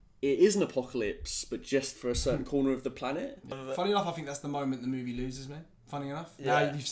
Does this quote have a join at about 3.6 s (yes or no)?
yes